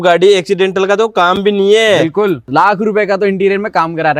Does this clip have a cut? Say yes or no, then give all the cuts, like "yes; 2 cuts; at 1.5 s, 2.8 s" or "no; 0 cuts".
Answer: yes; 1 cut; at 2.4 s